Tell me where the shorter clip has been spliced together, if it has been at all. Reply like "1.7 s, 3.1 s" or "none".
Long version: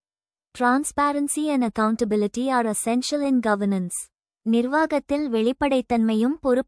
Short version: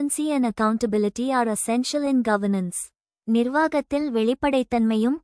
none

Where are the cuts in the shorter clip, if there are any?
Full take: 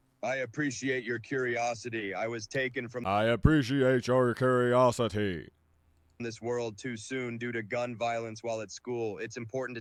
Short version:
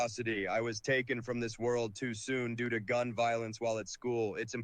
1.4 s

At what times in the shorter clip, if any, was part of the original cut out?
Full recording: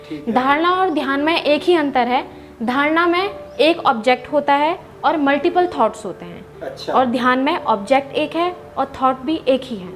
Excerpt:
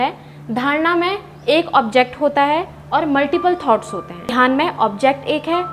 4.3 s

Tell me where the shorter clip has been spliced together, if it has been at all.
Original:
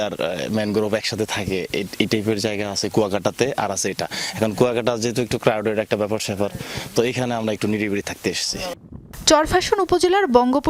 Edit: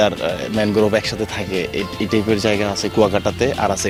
none

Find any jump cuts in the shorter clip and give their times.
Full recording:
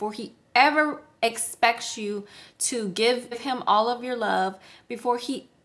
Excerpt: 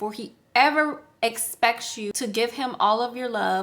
2.4 s

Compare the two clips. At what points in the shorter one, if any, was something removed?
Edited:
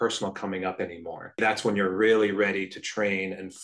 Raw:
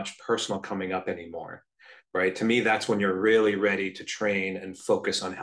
1.4 s

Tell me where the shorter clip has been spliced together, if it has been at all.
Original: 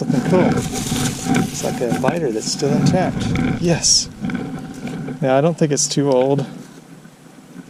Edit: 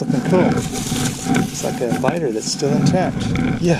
none

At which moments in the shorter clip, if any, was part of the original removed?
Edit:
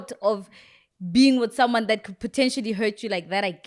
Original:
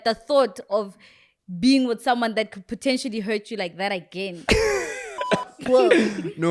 none

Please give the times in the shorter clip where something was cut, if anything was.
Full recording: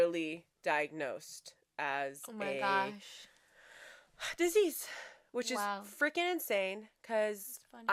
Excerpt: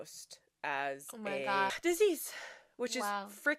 1.8 s

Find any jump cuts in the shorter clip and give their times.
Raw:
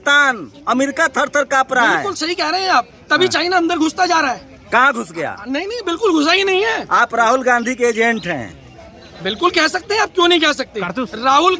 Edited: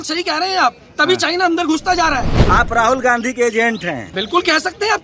2.4 s, 4.1 s

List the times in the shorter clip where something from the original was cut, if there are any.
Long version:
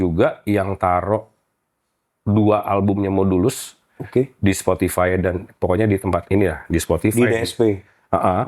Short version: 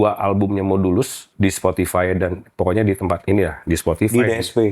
1.3 s

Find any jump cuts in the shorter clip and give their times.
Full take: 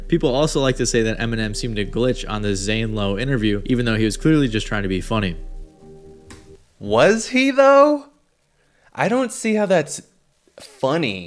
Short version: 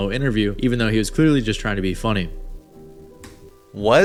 none

